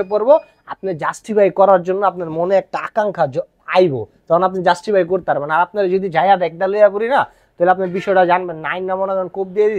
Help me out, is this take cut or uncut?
uncut